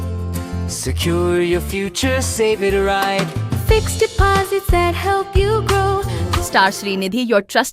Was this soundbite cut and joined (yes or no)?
yes